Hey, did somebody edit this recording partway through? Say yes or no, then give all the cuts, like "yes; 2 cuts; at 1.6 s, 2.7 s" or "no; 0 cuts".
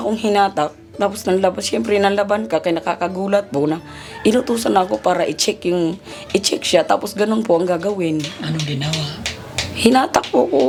no; 0 cuts